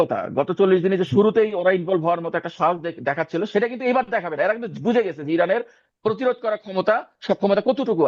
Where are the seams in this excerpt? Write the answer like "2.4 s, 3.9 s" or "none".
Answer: none